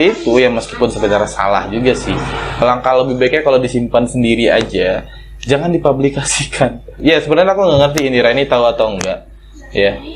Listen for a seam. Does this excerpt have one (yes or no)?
no